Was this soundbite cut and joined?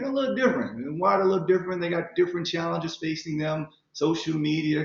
no; 0 cuts

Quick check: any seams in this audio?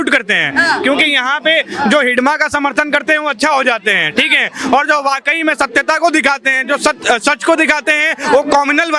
no; 0 cuts

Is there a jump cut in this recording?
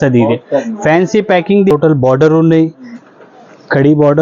yes; 1 cut; at 1.7 s

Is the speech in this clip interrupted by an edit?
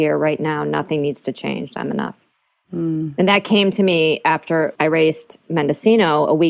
yes; 1 cut; at 4.7 s

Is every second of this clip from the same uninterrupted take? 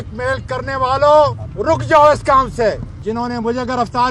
no; 2 cuts; at 1.5 s, 2.9 s

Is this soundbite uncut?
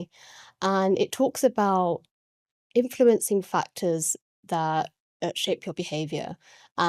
yes; 0 cuts

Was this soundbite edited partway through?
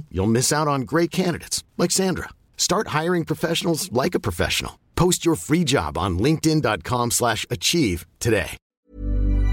yes; 1 cut; at 8.6 s

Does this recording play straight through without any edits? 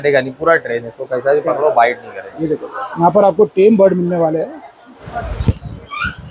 no; 1 cut; at 5.0 s

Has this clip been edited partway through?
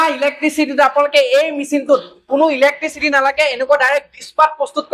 no; 0 cuts

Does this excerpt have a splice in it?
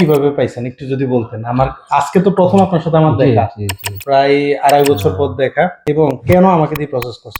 no; 0 cuts

